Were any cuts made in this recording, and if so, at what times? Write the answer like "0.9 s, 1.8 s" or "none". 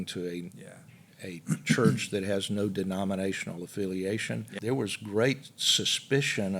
4.5 s